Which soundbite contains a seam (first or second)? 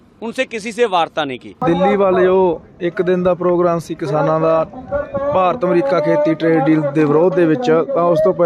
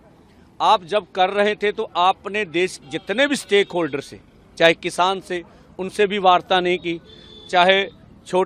first